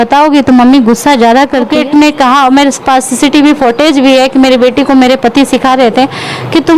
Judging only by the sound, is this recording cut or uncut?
cut